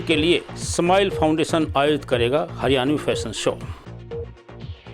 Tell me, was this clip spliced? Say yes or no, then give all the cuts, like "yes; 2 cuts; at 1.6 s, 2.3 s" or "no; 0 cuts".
yes; 1 cut; at 3.6 s